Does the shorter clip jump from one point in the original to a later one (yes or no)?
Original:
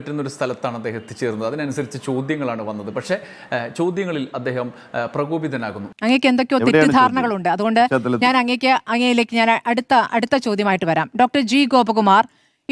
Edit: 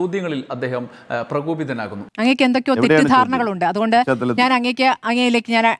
no